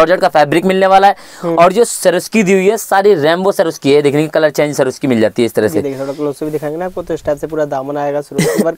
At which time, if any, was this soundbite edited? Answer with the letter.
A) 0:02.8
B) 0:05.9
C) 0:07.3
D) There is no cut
D